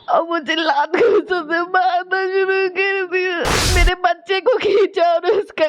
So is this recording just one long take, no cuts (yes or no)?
no